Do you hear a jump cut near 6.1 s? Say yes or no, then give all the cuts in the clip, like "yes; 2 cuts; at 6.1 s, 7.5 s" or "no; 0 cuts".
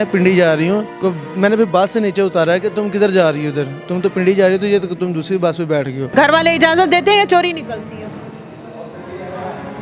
yes; 2 cuts; at 0.9 s, 6.1 s